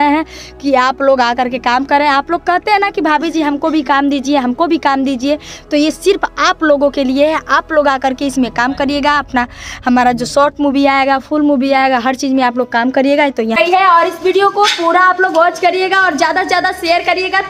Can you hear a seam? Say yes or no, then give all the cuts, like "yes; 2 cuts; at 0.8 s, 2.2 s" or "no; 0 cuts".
yes; 1 cut; at 13.6 s